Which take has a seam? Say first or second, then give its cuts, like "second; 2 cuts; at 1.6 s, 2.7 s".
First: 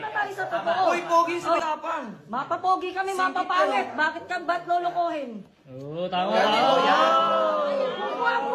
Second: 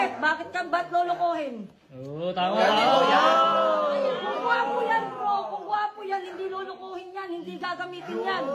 first; 1 cut; at 1.6 s